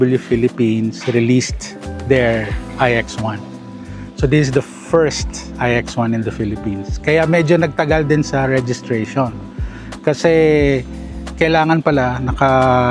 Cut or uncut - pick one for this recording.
uncut